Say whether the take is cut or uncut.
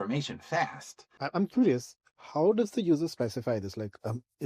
cut